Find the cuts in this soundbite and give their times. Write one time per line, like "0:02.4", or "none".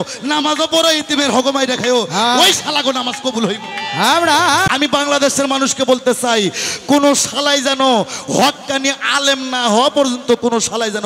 0:04.7